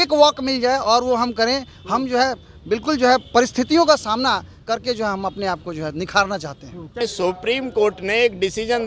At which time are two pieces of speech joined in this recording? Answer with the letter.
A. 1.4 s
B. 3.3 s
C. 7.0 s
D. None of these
C